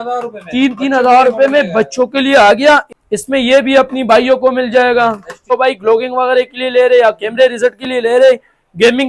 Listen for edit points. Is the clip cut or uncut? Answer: cut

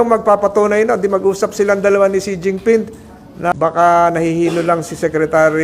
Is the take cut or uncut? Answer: cut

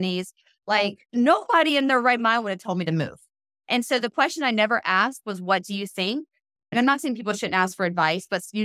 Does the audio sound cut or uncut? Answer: cut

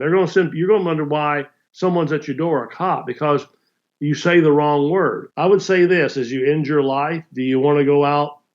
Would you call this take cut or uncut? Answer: cut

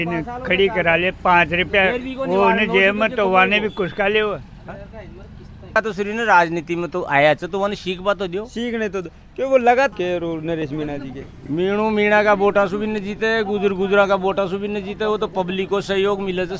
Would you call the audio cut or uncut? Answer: cut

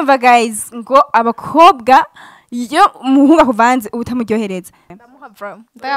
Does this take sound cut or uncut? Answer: cut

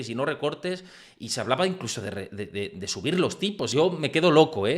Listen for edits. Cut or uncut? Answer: cut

